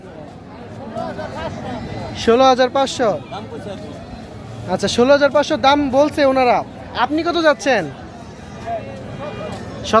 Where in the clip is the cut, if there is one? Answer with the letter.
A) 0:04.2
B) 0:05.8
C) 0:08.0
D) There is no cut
D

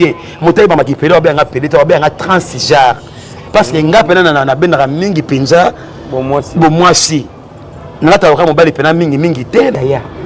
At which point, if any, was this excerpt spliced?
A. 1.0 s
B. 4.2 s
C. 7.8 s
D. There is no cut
B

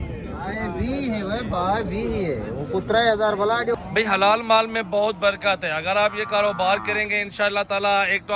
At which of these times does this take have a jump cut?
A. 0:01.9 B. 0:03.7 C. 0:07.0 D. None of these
B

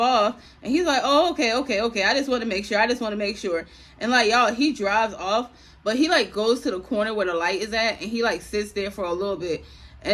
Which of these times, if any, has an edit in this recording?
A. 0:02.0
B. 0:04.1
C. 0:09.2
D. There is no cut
D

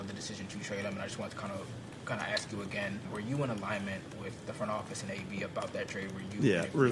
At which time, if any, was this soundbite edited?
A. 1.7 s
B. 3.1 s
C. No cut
B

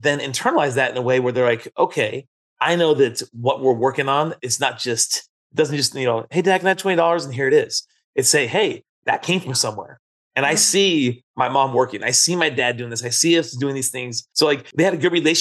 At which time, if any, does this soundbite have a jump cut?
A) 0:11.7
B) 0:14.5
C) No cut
B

